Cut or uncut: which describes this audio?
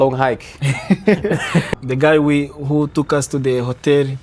cut